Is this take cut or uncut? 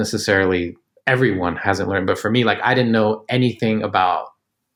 uncut